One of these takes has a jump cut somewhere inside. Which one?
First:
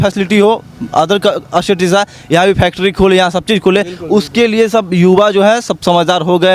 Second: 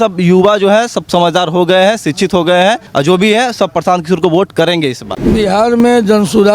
second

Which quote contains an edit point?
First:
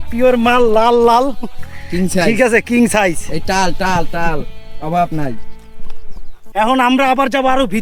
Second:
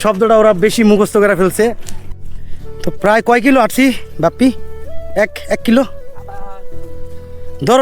second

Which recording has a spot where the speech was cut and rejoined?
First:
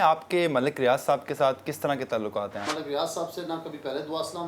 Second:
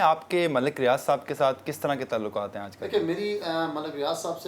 first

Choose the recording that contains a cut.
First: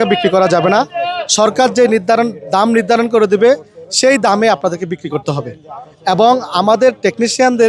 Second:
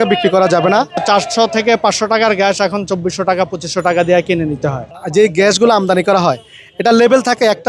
second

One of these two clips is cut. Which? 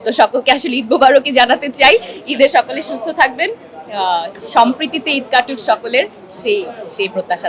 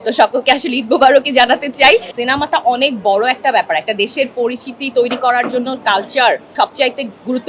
second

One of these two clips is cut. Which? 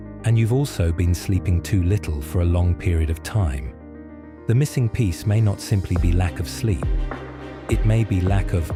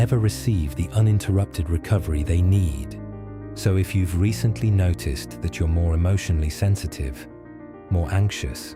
second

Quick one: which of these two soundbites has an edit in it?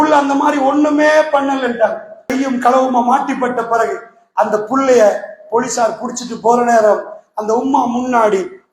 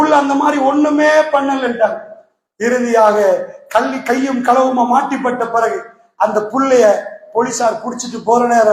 first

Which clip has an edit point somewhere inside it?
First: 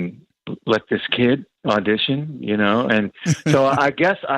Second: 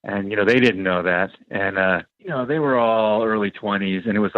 second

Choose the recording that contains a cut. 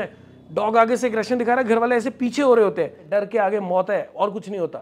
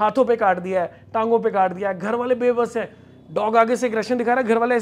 first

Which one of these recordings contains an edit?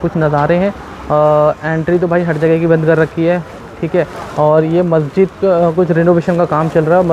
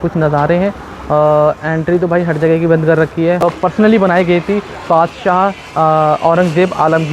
second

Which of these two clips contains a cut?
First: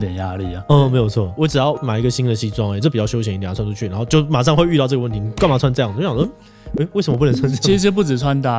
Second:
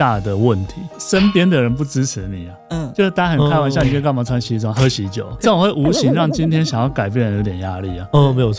second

